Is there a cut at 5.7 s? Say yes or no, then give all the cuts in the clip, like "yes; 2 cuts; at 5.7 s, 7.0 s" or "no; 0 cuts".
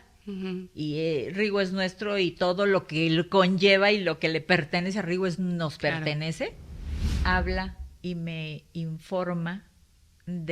no; 1 cut; at 7.2 s